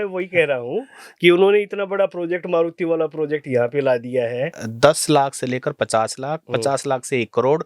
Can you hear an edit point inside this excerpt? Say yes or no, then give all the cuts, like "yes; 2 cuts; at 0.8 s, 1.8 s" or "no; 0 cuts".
yes; 1 cut; at 4.6 s